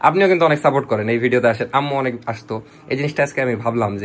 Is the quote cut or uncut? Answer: uncut